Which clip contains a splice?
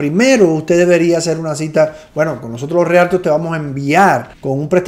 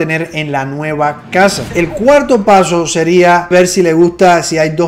second; 2 cuts; at 1.7 s, 3.5 s

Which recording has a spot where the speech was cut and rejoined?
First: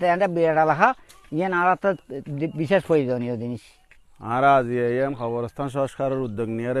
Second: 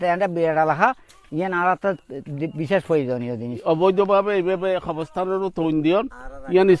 second; 1 cut; at 3.6 s

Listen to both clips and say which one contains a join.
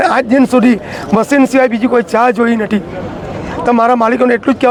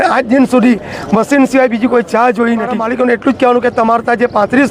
second; 1 cut; at 2.8 s

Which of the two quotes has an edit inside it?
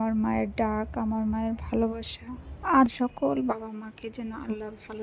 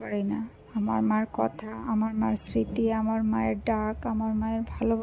first; 1 cut; at 2.9 s

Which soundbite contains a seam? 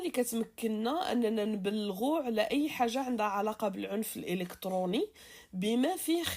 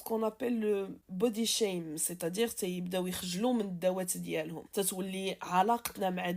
second; 2 cuts; at 1.0 s, 4.6 s

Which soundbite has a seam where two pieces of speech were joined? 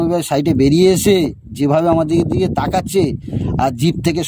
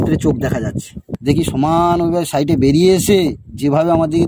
second; 1 cut; at 1.0 s

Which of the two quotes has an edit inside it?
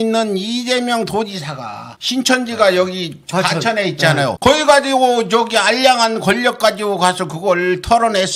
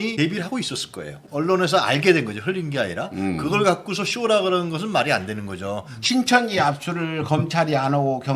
second; 2 cuts; at 1.2 s, 6.0 s

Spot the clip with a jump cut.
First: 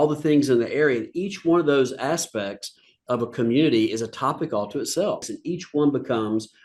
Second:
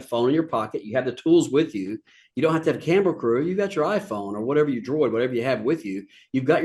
first; 1 cut; at 5.3 s

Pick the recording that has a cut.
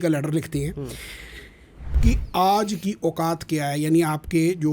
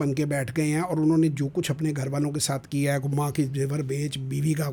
first; 1 cut; at 1.9 s

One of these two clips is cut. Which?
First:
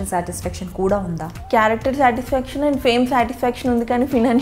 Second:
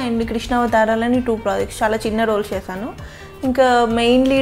first; 1 cut; at 1.3 s

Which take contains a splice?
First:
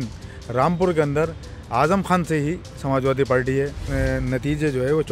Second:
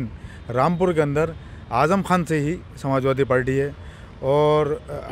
first; 1 cut; at 3.9 s

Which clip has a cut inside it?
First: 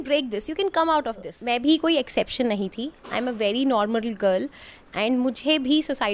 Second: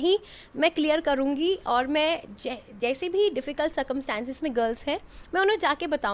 first; 1 cut; at 1.3 s

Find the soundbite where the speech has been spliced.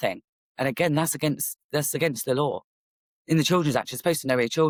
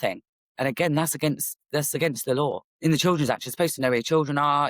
second; 1 cut; at 2.7 s

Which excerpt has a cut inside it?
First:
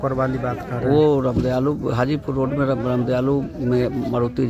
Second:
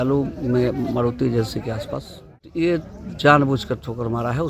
second; 1 cut; at 2.5 s

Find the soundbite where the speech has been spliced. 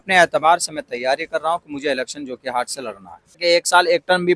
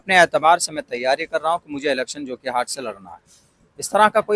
first; 1 cut; at 3.4 s

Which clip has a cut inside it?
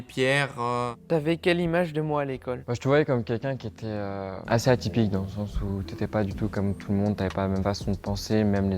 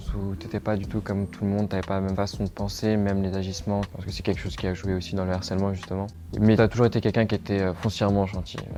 first; 3 cuts; at 0.9 s, 2.7 s, 4.4 s

